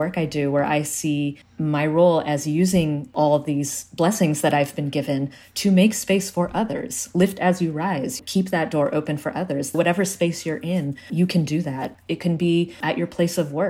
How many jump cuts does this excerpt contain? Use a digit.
1